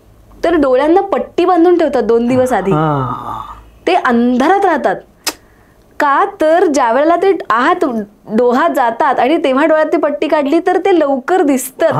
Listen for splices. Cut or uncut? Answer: uncut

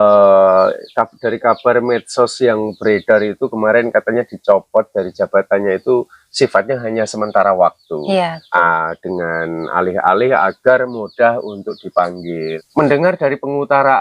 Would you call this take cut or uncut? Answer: cut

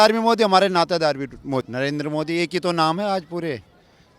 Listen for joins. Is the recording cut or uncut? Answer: cut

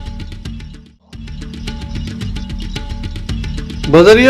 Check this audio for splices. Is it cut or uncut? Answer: cut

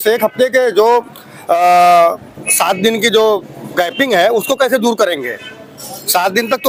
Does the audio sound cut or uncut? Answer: uncut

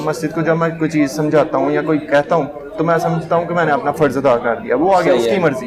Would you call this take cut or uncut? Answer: uncut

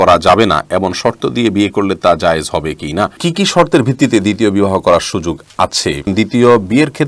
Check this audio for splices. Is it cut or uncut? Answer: cut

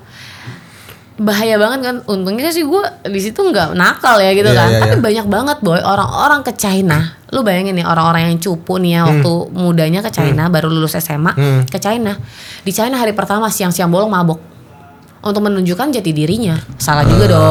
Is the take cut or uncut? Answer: uncut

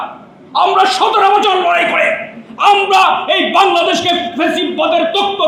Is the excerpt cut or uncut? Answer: uncut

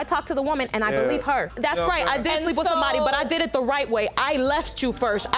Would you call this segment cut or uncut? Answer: uncut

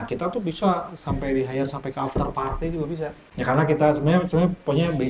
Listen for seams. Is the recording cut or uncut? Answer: cut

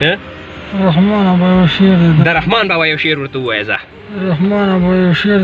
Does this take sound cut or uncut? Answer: uncut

